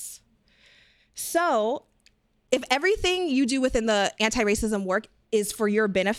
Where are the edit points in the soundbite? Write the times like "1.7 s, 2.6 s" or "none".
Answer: 2.4 s